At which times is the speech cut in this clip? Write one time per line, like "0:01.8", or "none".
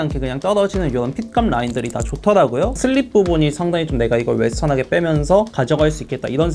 0:02.8